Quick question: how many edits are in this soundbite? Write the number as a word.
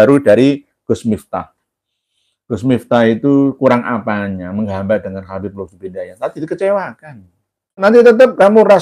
one